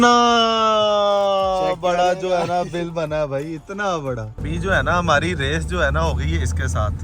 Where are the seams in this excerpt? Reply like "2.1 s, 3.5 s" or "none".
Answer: 4.4 s